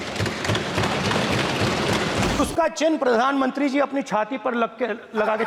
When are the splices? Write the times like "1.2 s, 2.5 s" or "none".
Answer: 2.4 s